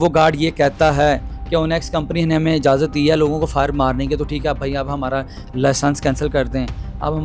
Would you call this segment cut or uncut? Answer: uncut